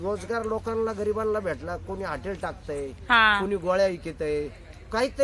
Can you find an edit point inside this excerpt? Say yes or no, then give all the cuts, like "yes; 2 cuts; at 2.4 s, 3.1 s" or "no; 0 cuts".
no; 0 cuts